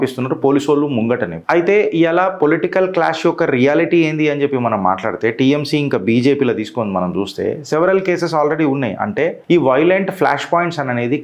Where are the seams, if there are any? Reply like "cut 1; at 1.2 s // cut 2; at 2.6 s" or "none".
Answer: cut 1; at 1.3 s // cut 2; at 9.4 s